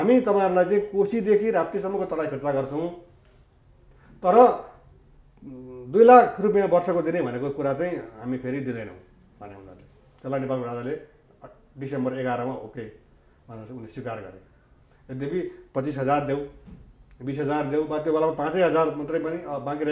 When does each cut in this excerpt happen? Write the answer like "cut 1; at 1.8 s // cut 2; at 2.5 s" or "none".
none